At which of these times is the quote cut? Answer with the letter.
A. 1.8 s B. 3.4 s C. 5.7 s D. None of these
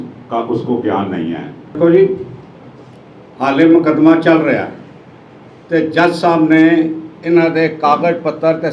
A